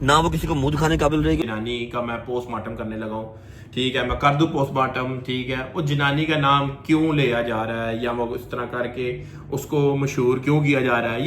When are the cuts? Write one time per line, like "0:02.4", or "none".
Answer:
0:01.4